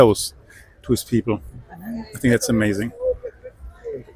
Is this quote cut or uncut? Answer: uncut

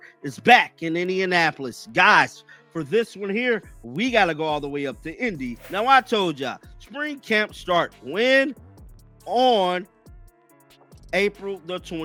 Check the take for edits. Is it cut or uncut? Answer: uncut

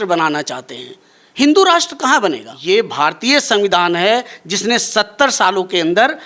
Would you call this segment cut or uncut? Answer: cut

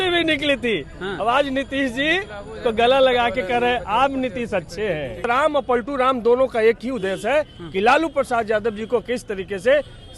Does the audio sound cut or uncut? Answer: cut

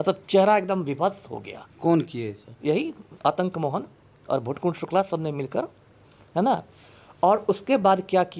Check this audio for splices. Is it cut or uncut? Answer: uncut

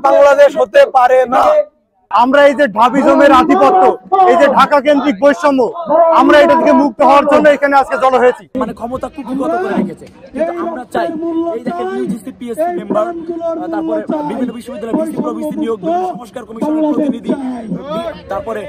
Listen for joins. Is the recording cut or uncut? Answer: cut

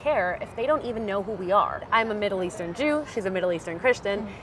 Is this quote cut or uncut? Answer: cut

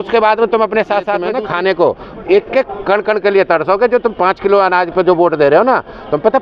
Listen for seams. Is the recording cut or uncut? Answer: cut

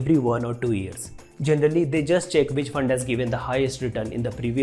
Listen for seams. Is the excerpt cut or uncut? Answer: uncut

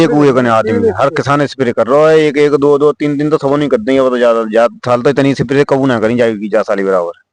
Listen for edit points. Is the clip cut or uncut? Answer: uncut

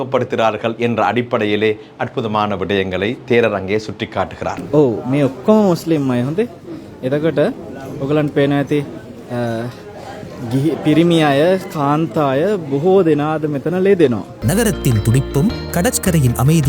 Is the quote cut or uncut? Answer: cut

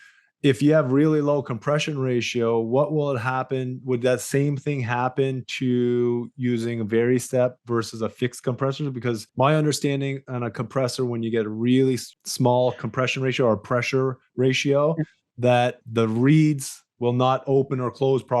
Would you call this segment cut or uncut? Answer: cut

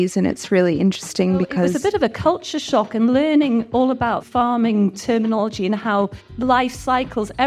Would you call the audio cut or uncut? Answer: cut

